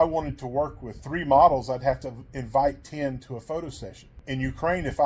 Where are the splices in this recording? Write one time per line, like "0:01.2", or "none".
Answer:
0:01.1